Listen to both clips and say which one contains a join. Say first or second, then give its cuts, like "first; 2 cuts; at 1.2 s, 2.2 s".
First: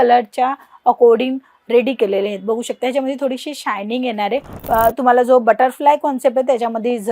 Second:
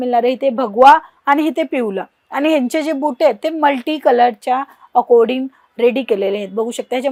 first; 1 cut; at 4.5 s